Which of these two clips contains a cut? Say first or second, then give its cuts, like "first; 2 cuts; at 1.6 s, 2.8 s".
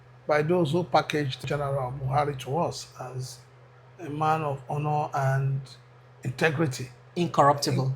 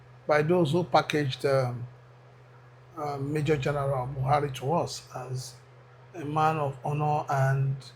first; 1 cut; at 1.4 s